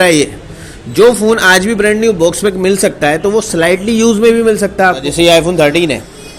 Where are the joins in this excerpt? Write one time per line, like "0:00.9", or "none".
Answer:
0:05.1